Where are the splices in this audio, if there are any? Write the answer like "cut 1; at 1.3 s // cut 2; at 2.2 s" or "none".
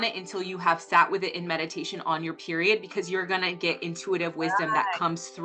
none